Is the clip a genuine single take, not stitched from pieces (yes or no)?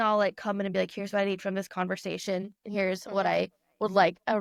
yes